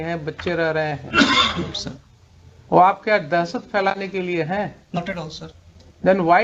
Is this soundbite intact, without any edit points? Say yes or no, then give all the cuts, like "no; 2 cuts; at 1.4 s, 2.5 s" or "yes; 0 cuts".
yes; 0 cuts